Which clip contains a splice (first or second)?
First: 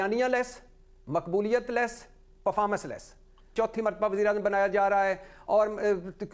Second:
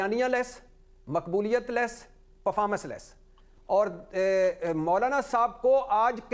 first